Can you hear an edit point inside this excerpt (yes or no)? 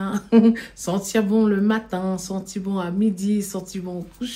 no